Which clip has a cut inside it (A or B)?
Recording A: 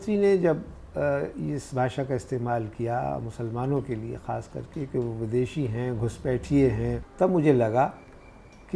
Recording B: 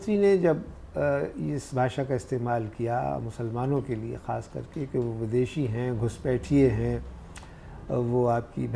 A